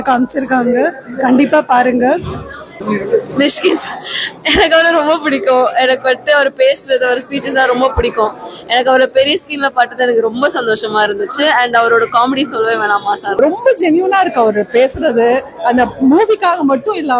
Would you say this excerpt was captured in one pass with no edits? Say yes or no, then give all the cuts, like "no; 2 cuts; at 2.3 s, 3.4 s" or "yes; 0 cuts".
no; 2 cuts; at 2.7 s, 13.4 s